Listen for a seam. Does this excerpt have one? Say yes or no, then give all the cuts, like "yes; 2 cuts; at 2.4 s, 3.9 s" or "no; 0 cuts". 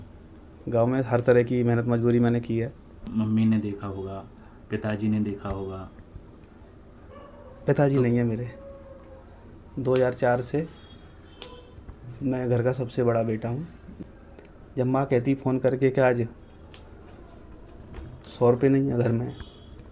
yes; 2 cuts; at 3.0 s, 13.9 s